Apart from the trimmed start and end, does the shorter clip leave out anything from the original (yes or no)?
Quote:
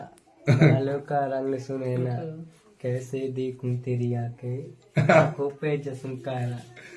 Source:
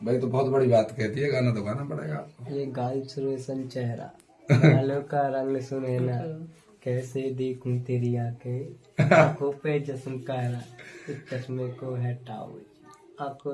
no